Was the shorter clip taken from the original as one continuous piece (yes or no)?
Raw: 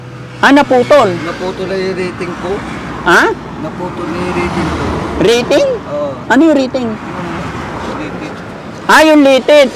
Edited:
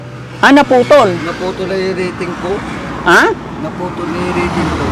yes